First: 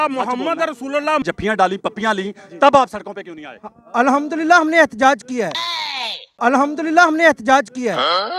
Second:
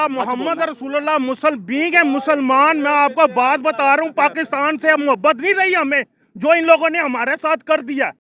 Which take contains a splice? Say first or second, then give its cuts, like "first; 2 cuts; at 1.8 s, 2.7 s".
first; 1 cut; at 1.2 s